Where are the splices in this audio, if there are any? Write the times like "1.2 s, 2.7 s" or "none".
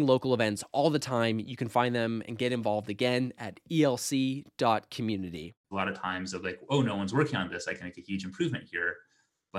5.5 s